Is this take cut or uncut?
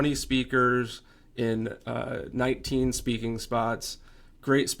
uncut